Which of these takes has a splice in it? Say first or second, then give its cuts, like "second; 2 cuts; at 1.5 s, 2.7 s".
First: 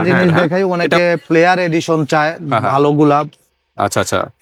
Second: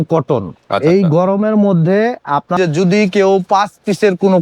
second; 1 cut; at 2.5 s